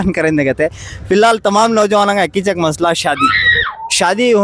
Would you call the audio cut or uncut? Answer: cut